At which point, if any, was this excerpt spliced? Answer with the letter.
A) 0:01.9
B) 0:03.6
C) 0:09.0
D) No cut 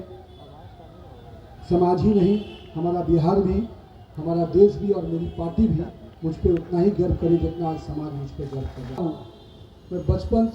C